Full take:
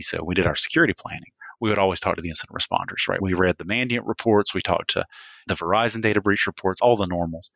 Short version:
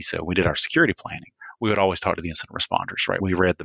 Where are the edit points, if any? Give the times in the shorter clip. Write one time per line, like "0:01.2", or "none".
none